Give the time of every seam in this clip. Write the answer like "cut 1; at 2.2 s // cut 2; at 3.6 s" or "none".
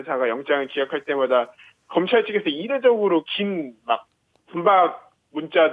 none